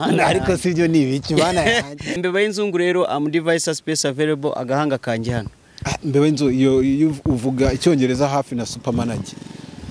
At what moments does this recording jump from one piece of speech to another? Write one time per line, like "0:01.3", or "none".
0:02.2